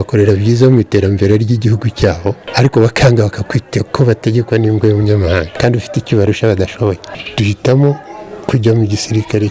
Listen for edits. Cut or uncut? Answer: cut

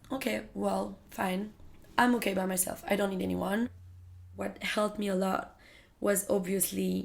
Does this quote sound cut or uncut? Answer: cut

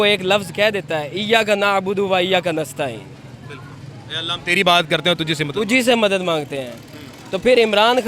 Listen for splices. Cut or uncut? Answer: uncut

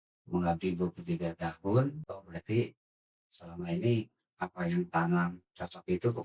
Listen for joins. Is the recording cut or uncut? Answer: cut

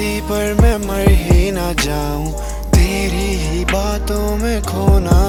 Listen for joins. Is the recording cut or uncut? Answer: uncut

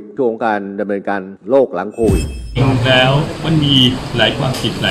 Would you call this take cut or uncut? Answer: cut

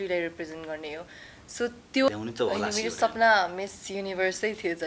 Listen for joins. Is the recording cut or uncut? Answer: cut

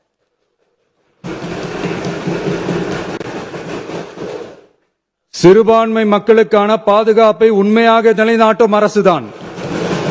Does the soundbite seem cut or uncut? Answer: uncut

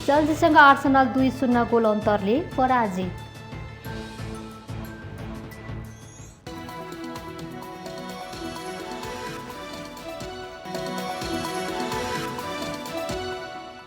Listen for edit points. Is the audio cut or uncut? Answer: cut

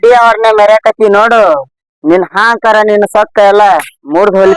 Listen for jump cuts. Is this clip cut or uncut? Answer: uncut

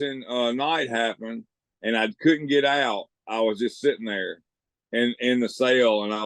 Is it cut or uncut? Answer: uncut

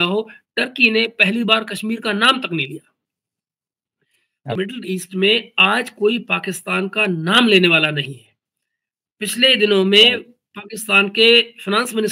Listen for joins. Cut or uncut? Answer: cut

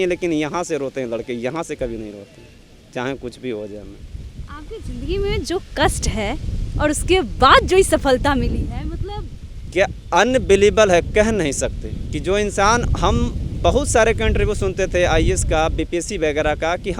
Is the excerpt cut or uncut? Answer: uncut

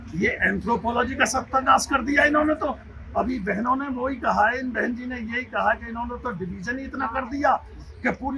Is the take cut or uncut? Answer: uncut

